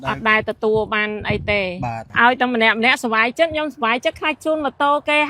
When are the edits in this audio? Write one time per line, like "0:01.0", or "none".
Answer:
0:02.0